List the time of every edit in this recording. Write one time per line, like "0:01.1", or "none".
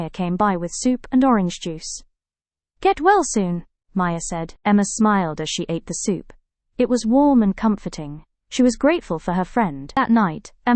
0:09.8

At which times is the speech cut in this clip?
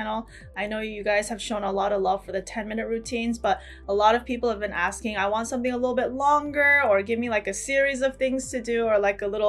none

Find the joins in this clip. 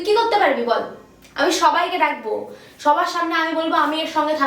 none

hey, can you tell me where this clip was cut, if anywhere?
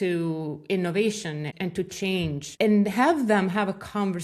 0:01.5
0:02.4

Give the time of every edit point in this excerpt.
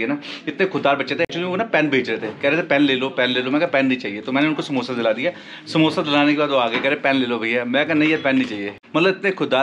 none

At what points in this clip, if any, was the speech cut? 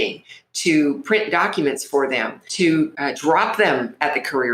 0:02.4
0:03.0

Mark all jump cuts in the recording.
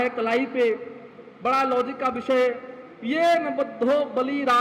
none

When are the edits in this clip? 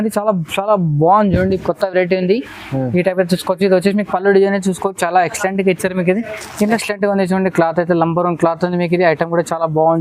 0:06.8

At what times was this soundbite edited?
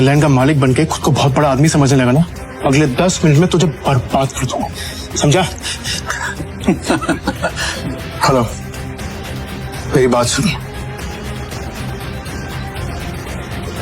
0:02.4
0:07.7
0:11.5

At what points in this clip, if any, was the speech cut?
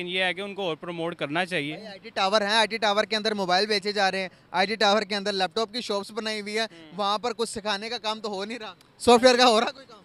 none

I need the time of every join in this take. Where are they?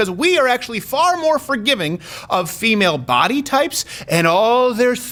none

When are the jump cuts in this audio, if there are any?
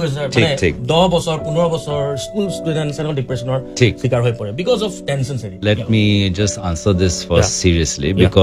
0:05.6

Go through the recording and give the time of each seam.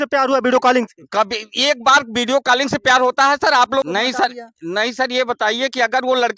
0:03.8

